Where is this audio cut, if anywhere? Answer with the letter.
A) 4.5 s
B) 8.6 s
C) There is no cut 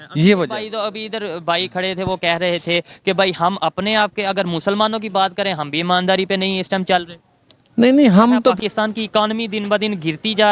B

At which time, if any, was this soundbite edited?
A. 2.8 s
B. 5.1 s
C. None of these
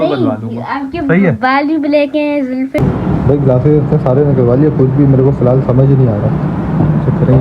A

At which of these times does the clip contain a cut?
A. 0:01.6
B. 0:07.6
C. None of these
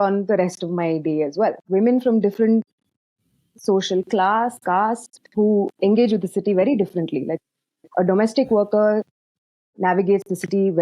A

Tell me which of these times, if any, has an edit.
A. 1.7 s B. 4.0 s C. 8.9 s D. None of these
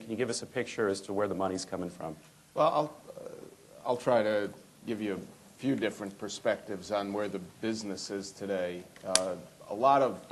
D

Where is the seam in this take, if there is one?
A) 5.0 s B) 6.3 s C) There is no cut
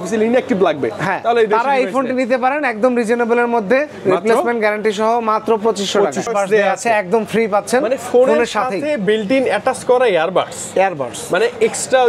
B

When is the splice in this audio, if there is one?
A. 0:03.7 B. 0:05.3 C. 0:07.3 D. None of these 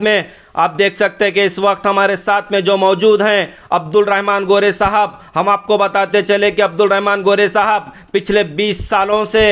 D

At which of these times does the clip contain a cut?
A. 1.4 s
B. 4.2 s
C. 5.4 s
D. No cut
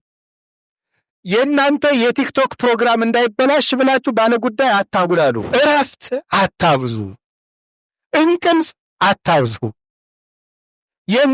C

